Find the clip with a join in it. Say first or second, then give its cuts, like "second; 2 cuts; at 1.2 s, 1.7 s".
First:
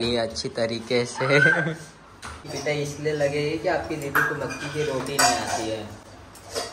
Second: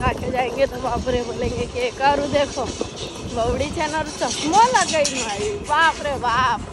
first; 1 cut; at 2.4 s